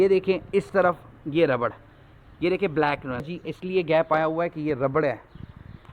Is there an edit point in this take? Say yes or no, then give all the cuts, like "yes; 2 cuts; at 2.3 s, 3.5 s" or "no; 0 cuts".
yes; 1 cut; at 3.2 s